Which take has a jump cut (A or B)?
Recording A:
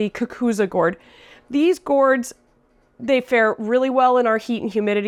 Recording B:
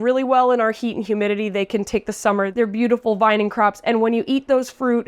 B